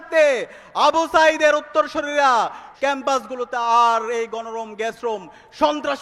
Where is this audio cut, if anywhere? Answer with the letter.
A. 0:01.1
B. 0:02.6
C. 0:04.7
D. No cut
B